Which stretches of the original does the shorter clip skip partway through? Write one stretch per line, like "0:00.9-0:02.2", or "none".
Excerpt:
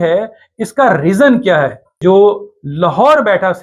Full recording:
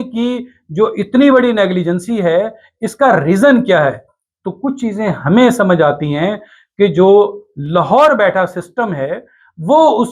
0:04.2-0:06.9

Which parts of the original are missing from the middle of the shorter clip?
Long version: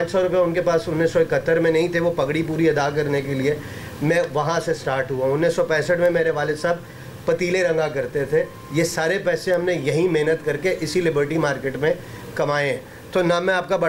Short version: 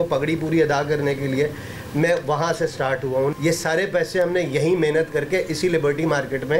0:05.4-0:08.6

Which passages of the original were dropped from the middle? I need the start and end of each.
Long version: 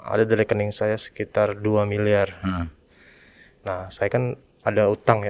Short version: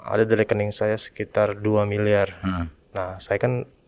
0:02.8-0:03.5

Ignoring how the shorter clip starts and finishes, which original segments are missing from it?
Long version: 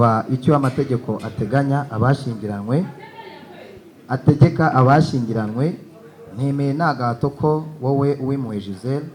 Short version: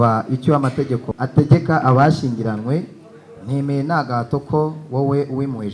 0:01.1-0:04.0

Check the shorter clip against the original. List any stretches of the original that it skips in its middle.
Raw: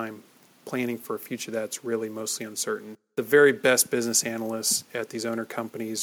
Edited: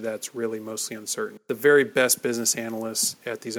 0:02.9-0:03.0

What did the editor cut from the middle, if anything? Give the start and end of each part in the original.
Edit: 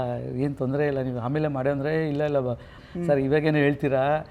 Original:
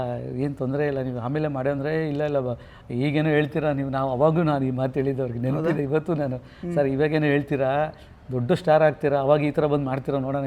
0:02.8-0:06.5

